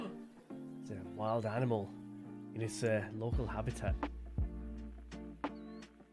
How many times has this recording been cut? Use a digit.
1